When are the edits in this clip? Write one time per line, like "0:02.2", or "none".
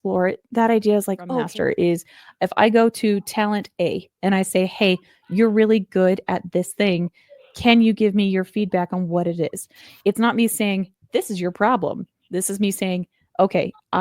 0:01.5

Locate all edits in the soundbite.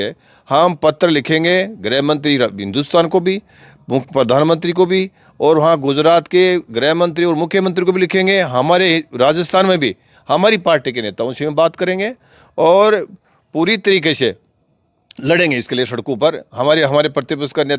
none

